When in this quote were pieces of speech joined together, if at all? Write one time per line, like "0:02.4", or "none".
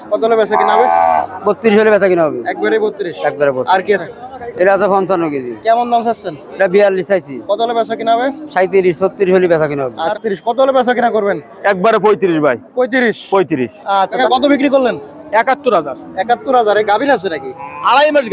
0:04.0
0:10.0
0:14.1